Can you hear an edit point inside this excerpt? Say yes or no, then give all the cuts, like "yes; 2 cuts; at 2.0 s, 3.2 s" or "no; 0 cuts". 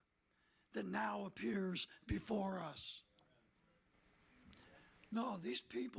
yes; 1 cut; at 4.0 s